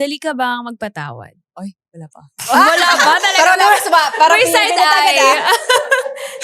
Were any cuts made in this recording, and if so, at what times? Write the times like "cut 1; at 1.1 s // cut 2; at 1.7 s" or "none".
cut 1; at 1.4 s